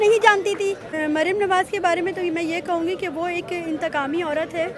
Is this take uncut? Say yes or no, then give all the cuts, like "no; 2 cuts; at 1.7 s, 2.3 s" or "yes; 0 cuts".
no; 1 cut; at 0.9 s